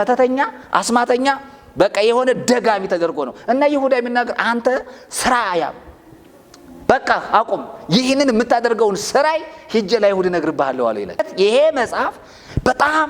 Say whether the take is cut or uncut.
cut